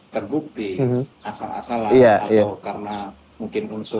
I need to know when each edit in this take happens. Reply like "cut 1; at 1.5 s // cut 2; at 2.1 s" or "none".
cut 1; at 1.2 s